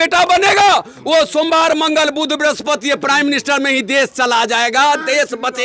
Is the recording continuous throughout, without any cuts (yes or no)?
yes